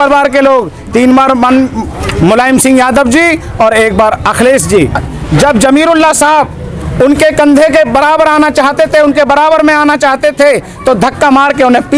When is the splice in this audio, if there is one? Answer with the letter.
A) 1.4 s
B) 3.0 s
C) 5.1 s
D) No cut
C